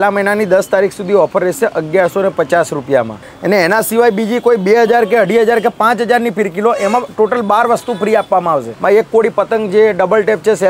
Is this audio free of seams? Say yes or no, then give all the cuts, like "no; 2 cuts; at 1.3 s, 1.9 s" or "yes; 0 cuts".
no; 2 cuts; at 3.2 s, 8.7 s